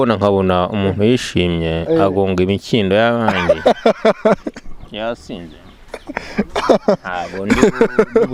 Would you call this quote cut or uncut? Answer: uncut